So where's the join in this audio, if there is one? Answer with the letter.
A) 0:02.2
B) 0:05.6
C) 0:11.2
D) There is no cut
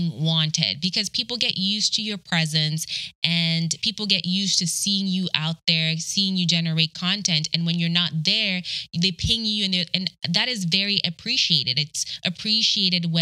D